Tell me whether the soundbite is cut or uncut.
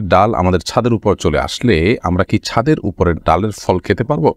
uncut